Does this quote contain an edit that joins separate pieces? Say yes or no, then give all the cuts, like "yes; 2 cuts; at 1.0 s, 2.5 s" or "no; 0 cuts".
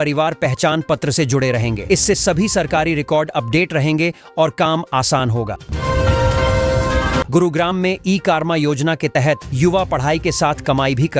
yes; 2 cuts; at 5.6 s, 7.3 s